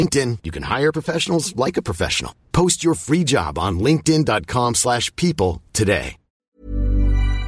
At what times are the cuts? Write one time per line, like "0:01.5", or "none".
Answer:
0:06.5